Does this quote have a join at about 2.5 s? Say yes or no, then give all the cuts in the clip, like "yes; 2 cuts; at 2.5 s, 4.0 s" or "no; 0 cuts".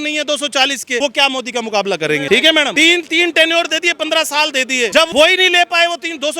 yes; 3 cuts; at 1.0 s, 2.5 s, 5.0 s